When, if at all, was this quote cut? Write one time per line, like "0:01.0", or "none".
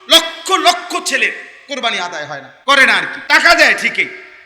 0:02.5
0:03.1